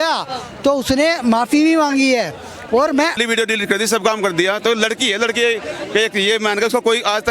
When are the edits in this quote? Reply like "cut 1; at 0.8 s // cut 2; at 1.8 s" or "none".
cut 1; at 3.2 s